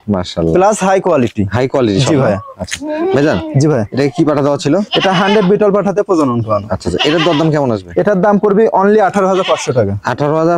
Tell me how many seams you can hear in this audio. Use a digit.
0